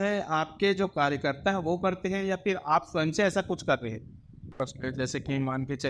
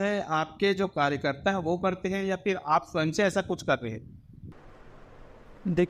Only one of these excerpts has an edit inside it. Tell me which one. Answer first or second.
first